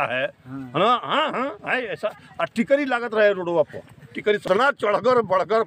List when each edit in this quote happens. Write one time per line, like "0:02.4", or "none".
0:04.4